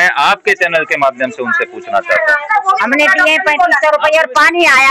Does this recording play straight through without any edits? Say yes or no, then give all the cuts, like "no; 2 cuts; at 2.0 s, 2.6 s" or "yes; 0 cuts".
no; 1 cut; at 2.4 s